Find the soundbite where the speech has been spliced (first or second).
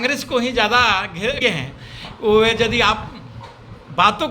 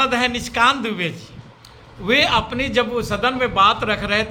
first